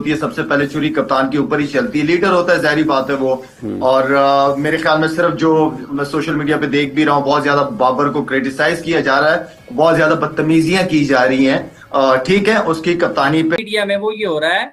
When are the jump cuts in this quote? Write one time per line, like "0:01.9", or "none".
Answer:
0:13.6